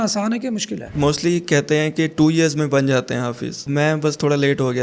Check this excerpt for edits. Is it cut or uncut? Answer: cut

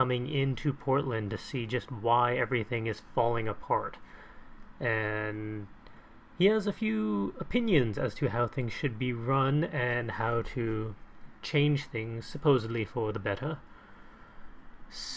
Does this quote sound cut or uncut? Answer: cut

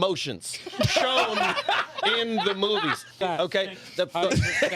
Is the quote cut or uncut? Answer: cut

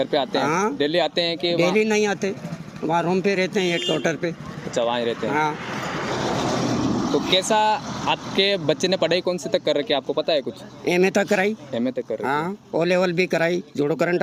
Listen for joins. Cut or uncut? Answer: uncut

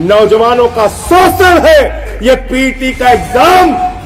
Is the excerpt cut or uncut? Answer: cut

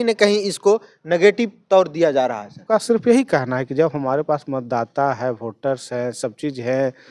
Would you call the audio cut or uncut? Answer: cut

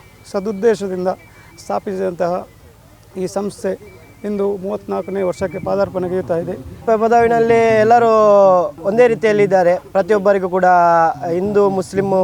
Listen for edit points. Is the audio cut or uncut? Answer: cut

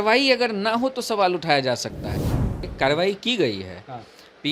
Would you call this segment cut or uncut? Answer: cut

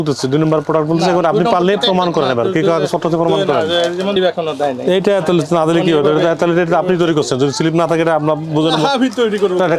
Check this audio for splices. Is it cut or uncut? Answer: cut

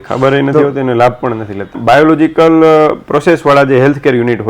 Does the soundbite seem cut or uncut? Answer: cut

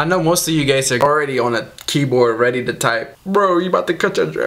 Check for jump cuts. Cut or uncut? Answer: cut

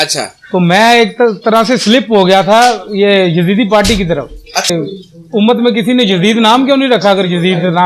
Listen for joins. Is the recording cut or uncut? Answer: cut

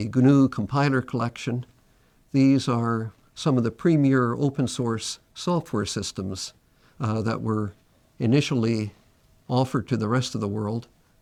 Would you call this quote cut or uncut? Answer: uncut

